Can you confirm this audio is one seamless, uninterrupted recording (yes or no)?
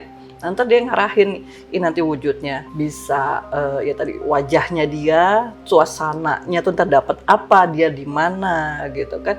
no